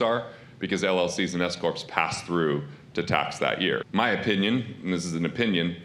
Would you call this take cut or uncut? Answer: cut